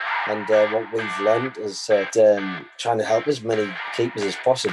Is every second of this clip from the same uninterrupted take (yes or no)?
no